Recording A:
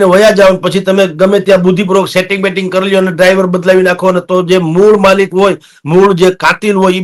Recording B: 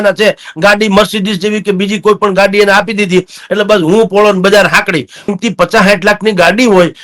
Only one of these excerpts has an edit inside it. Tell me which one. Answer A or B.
B